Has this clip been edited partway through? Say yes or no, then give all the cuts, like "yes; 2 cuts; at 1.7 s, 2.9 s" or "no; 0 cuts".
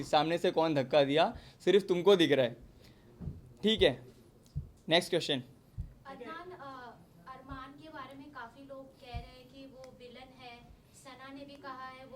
no; 0 cuts